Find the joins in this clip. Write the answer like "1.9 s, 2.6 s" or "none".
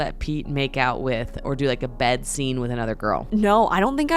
3.2 s

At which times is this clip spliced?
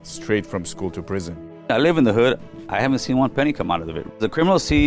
1.7 s, 4.1 s

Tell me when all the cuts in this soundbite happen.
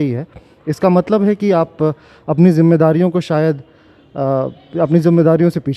none

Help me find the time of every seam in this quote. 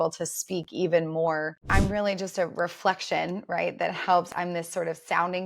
1.7 s, 4.3 s

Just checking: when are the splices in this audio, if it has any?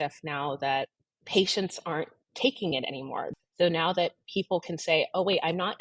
3.3 s

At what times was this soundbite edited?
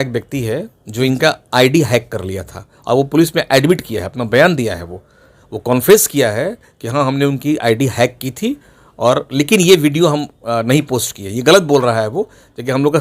none

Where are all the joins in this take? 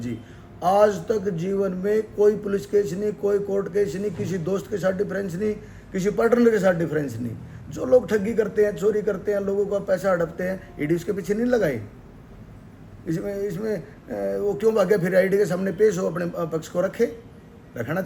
none

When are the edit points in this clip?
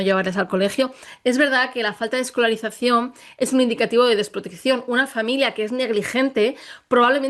none

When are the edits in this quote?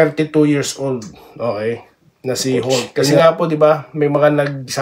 3.2 s

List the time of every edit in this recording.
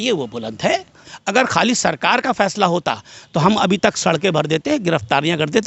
1.0 s

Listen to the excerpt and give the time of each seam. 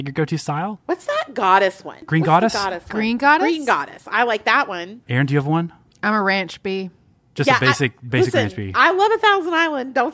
0.8 s, 2.0 s, 4.9 s

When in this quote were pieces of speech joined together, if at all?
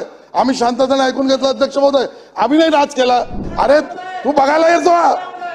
3.4 s

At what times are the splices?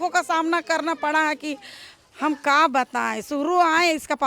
none

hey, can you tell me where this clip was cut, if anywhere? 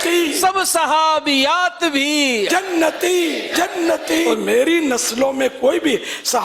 4.3 s

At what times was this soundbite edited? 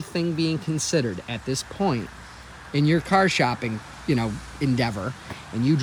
none

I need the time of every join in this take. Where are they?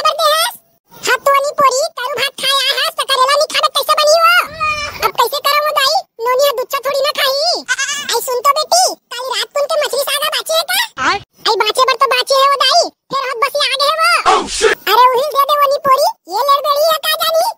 none

